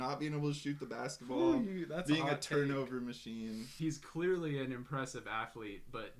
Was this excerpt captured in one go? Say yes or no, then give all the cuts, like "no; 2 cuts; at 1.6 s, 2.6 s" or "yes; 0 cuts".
no; 1 cut; at 3.7 s